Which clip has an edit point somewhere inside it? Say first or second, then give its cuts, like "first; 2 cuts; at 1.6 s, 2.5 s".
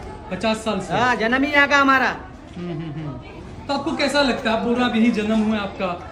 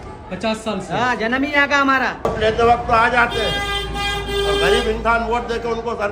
second; 1 cut; at 2.3 s